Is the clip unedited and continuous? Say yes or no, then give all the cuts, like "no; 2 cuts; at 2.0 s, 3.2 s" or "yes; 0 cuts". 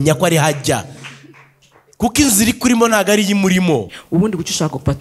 no; 1 cut; at 3.9 s